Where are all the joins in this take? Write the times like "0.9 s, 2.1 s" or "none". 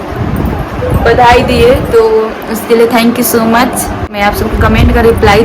4.1 s